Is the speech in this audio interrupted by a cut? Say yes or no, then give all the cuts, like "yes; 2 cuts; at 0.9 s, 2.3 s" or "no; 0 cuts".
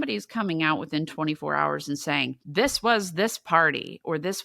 yes; 1 cut; at 2.4 s